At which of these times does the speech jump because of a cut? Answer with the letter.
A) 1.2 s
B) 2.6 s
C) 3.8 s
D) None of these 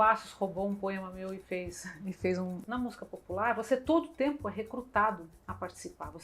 B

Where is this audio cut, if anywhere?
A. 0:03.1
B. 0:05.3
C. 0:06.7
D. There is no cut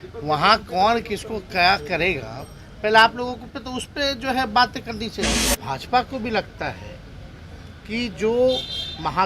B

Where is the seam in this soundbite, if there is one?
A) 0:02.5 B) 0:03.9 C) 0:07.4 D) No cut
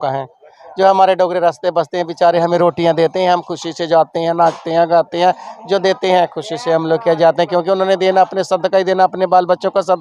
D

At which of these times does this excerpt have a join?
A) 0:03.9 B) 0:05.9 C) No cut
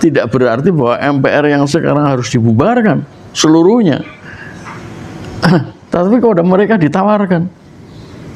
C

